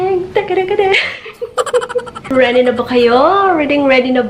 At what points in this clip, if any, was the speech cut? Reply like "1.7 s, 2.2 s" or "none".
2.3 s